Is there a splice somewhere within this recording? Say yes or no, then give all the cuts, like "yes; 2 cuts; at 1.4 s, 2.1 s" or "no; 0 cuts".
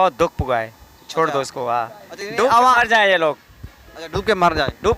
no; 0 cuts